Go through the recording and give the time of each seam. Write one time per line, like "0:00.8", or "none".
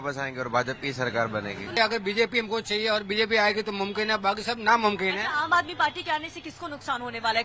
0:01.8